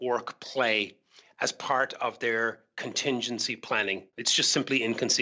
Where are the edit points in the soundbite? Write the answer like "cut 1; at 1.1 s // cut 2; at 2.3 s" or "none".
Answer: cut 1; at 4.1 s